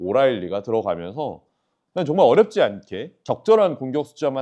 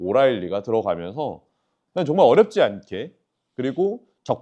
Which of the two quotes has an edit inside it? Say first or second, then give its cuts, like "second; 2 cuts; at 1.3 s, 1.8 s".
first; 1 cut; at 3.1 s